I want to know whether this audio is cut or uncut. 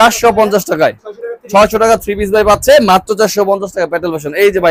uncut